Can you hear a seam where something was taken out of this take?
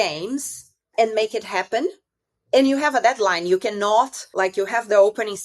yes; 1 cut; at 4.2 s

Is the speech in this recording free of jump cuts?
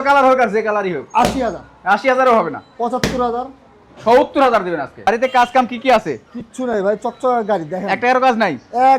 no; 1 cut; at 5.1 s

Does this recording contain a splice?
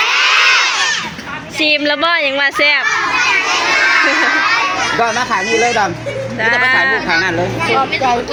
no; 0 cuts

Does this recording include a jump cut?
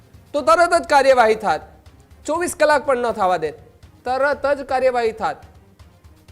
no; 0 cuts

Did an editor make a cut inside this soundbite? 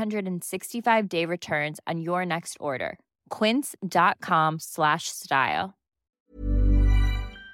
yes; 1 cut; at 6.0 s

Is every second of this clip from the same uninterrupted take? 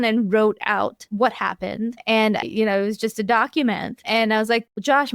no; 2 cuts; at 1.0 s, 2.4 s

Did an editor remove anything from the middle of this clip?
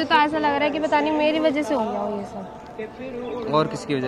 no; 0 cuts

